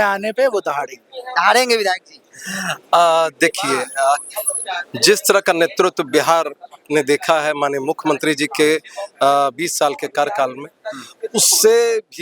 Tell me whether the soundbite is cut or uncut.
uncut